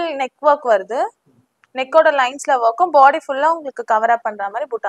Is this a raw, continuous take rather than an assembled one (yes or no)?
yes